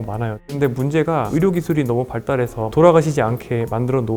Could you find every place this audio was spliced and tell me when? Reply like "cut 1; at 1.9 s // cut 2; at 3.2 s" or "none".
cut 1; at 1.3 s // cut 2; at 2.7 s